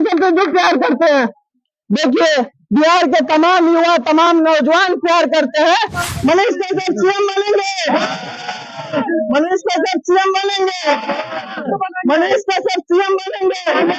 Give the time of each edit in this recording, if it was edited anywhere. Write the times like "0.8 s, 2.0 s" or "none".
6.0 s